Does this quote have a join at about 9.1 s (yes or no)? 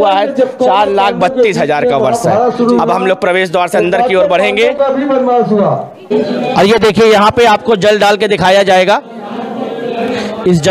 no